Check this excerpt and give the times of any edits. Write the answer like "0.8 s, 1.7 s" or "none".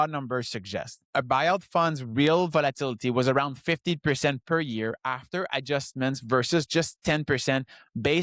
1.0 s

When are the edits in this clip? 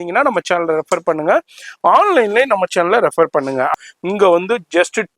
3.7 s

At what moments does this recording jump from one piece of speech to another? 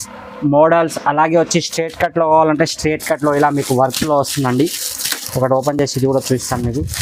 none

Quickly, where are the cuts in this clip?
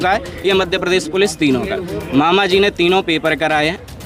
none

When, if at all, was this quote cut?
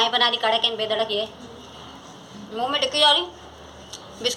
2.0 s

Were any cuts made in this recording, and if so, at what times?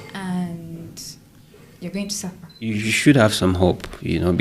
2.7 s

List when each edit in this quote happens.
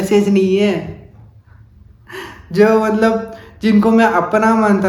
none

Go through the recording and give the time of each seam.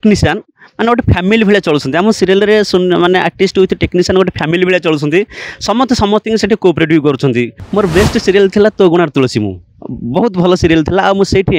7.6 s

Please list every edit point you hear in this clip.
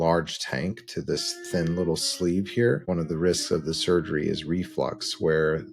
2.9 s

